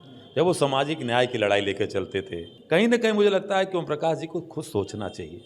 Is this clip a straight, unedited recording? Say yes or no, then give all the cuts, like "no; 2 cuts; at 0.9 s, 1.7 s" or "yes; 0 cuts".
no; 1 cut; at 2.5 s